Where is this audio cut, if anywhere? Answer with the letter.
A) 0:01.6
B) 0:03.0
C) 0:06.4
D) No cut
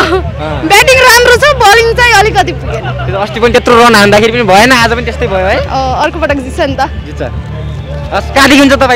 D